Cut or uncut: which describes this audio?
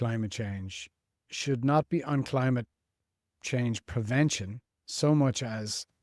uncut